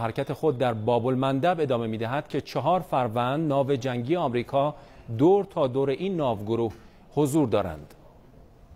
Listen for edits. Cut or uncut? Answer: uncut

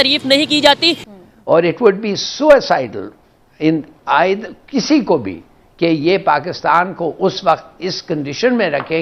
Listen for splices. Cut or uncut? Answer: cut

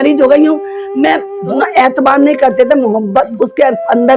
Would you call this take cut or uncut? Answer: cut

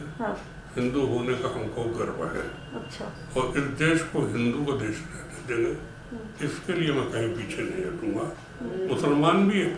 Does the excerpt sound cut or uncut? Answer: uncut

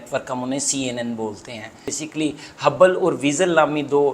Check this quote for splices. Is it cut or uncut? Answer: cut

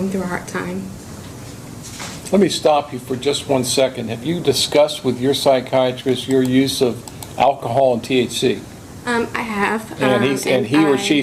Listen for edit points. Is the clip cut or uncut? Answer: uncut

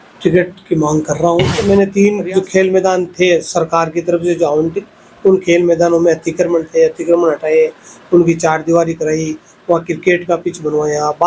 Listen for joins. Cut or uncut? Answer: cut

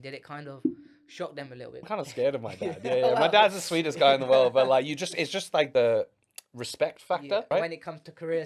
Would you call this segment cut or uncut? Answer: cut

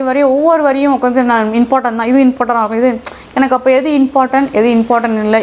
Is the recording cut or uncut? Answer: uncut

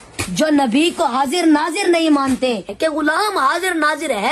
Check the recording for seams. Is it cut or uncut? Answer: cut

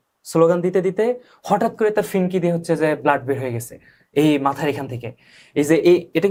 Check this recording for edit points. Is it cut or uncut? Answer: uncut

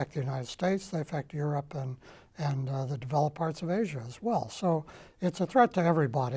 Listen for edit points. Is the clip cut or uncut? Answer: uncut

